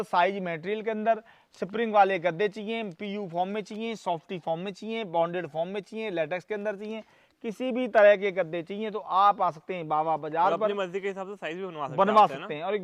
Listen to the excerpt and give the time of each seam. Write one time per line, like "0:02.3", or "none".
none